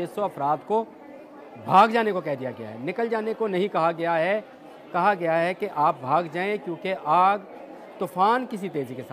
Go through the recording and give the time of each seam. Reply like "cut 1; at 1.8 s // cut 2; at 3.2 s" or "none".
none